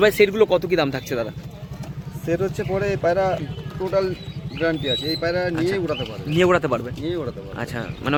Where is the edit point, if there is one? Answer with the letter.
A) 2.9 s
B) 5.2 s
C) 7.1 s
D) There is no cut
D